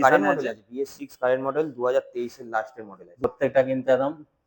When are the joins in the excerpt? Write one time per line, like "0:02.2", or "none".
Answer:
0:03.2